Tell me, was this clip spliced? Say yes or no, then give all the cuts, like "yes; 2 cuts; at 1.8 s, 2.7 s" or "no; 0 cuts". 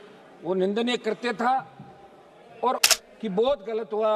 yes; 1 cut; at 2.9 s